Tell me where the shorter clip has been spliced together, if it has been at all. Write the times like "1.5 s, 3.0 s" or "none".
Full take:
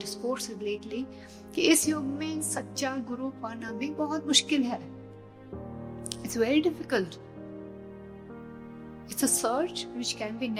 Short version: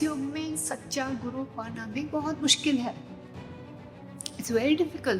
none

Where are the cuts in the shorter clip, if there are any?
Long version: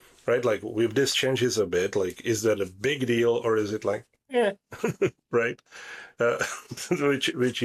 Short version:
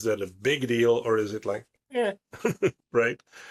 none

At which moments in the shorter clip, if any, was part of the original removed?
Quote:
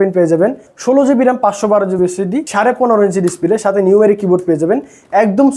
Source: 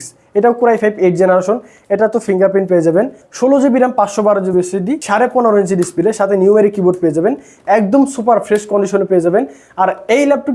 none

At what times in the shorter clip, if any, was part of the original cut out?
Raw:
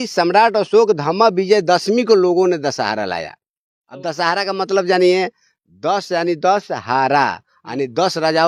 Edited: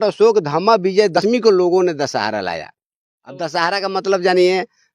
1.2 s

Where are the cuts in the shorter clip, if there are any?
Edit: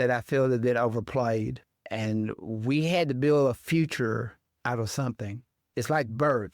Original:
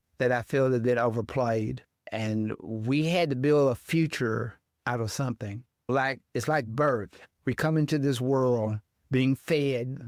5.6 s

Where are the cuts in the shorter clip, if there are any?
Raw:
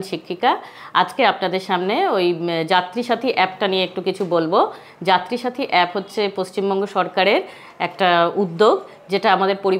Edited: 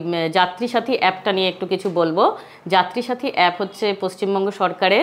none

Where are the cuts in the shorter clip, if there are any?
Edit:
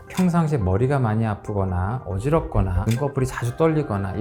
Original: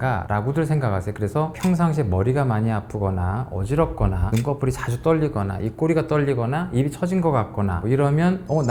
none

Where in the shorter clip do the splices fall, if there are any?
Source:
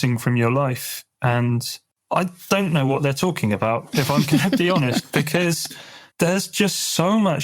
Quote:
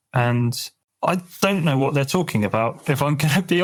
none

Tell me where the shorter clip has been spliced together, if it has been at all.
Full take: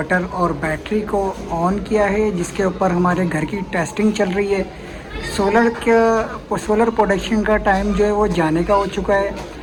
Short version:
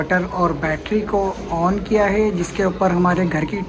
none

